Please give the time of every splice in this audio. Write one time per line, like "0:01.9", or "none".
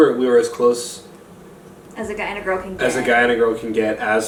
none